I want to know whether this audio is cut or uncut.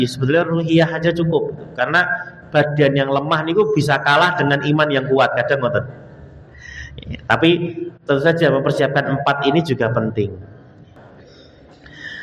cut